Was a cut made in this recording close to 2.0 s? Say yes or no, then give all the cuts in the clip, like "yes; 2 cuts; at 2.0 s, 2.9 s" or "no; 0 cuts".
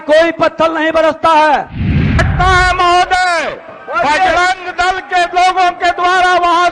yes; 1 cut; at 2.0 s